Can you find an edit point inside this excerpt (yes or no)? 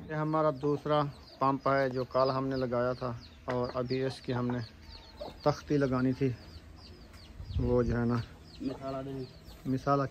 no